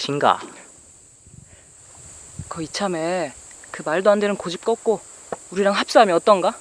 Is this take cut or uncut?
uncut